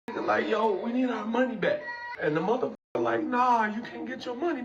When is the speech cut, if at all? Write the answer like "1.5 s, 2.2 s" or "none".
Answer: 2.0 s